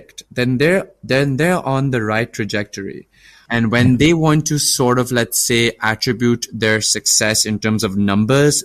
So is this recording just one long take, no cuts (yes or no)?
no